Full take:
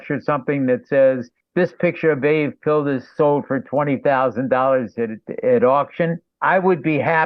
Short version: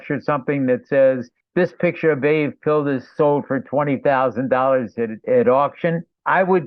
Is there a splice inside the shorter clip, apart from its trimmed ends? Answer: yes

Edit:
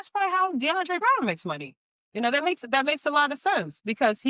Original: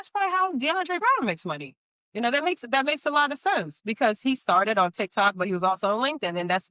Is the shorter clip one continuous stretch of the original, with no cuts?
yes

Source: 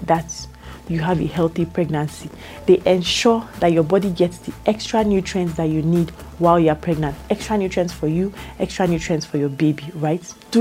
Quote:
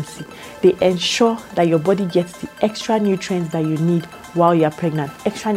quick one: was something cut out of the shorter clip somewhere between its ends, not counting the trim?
no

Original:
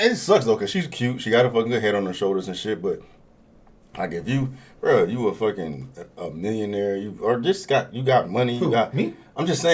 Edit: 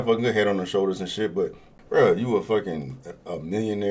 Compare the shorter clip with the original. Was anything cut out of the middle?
yes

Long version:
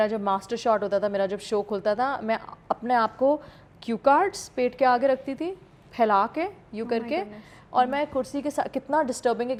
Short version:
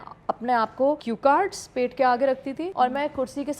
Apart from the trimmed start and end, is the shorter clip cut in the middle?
yes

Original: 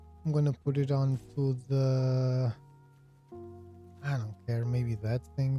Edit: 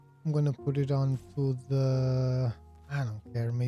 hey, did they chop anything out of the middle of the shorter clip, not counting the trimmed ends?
yes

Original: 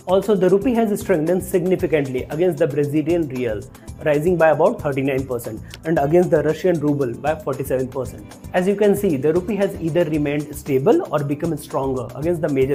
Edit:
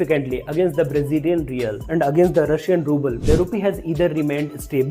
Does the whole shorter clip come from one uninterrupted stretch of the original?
no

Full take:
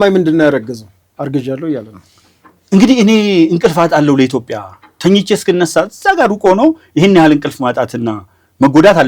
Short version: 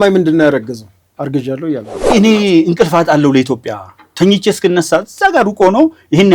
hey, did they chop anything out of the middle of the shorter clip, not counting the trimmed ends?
yes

